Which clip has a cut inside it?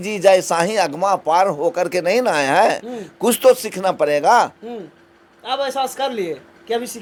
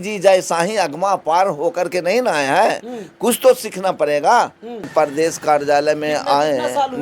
second; 1 cut; at 4.9 s

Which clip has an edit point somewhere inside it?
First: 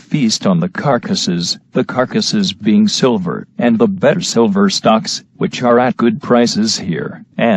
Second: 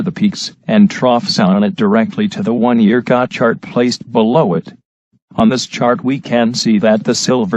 first; 1 cut; at 2.8 s

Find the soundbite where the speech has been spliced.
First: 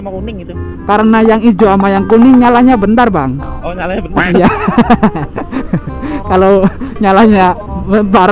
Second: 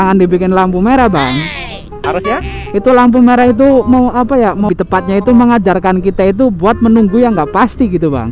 second; 1 cut; at 4.6 s

